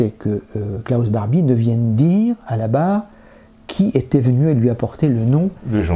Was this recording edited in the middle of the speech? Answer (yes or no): no